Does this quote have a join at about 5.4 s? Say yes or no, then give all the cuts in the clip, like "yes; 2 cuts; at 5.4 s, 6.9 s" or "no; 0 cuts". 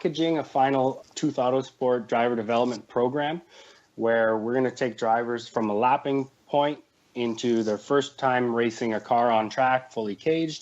yes; 2 cuts; at 1.0 s, 5.4 s